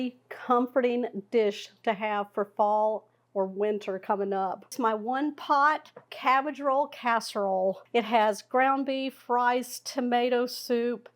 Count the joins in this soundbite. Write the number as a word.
two